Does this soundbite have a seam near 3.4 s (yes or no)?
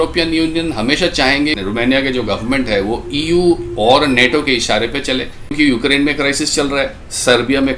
no